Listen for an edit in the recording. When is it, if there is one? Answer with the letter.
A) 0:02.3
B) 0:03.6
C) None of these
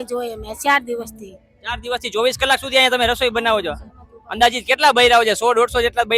C